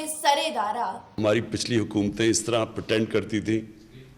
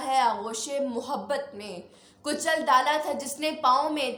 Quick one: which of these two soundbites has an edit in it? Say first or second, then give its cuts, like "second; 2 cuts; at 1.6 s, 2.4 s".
first; 1 cut; at 1.2 s